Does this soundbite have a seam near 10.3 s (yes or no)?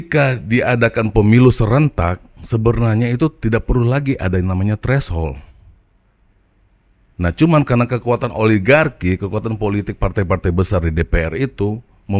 no